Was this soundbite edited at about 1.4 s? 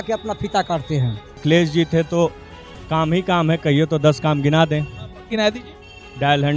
yes; 1 cut; at 1.4 s

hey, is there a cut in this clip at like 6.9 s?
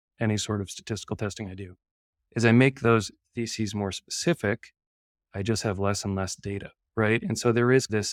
no; 0 cuts

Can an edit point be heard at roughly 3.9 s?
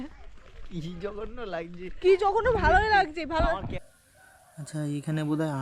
yes; 1 cut; at 3.9 s

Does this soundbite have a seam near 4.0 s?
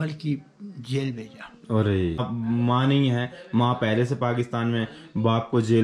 no; 1 cut; at 2.2 s

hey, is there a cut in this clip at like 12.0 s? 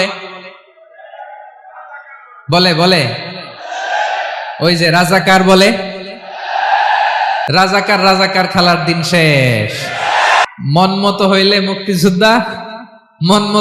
no; 2 cuts; at 7.5 s, 10.4 s

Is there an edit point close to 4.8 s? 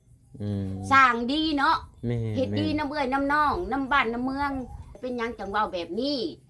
yes; 1 cut; at 4.8 s

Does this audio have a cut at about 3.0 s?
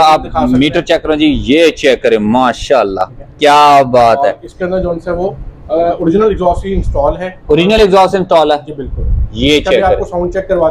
no; 0 cuts

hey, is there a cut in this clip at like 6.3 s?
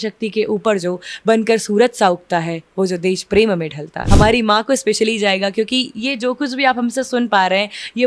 no; 1 cut; at 4.0 s

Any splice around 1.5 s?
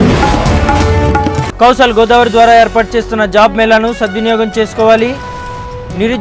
yes; 1 cut; at 1.5 s

